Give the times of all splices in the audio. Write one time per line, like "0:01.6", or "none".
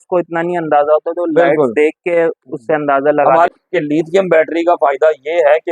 0:03.5